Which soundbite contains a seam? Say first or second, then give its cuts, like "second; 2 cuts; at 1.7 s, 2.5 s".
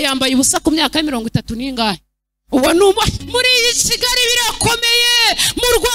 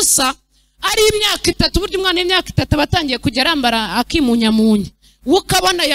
first; 1 cut; at 3.2 s